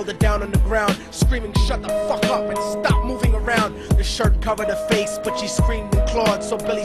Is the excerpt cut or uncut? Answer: uncut